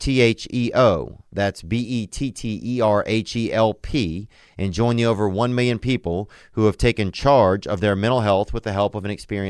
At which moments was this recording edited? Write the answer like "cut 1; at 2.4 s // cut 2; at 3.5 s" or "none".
none